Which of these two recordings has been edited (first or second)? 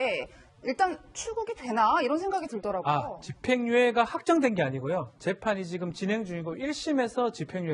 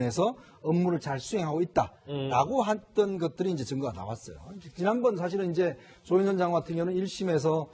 second